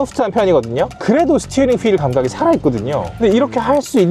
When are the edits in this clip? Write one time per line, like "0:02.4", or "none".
0:01.0
0:03.1

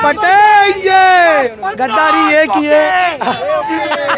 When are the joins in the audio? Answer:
0:01.5

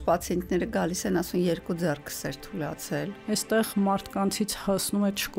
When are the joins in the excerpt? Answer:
0:03.2

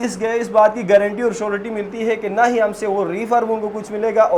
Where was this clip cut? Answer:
none

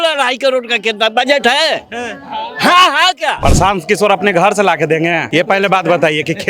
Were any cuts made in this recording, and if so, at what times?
0:03.4
0:05.2

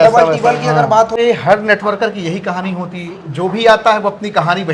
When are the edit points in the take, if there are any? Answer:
0:01.2

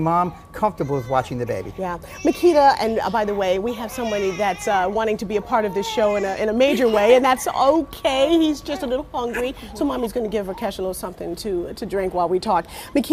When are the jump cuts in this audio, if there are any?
0:02.4

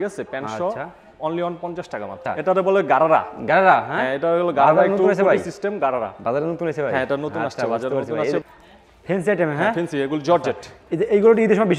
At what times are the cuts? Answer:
0:02.2
0:08.4

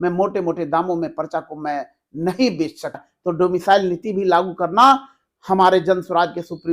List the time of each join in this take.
0:03.1

